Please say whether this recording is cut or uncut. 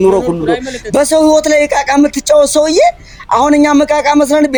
uncut